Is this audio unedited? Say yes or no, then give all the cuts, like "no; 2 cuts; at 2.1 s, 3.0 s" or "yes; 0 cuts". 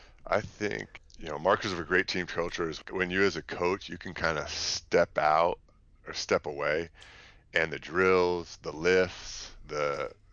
no; 2 cuts; at 0.9 s, 2.9 s